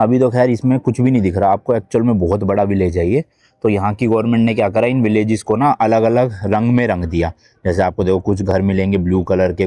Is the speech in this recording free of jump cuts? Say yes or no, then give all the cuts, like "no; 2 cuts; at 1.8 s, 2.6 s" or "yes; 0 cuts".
yes; 0 cuts